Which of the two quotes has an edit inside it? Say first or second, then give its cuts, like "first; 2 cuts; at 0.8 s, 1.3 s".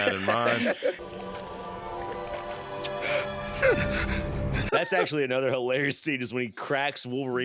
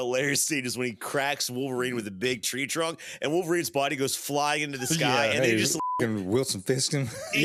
first; 2 cuts; at 1.0 s, 4.6 s